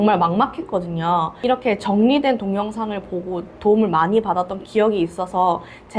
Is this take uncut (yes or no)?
no